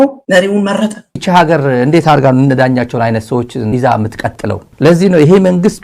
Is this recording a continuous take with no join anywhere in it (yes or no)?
no